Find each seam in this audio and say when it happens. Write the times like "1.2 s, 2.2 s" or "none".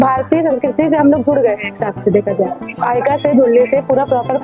2.6 s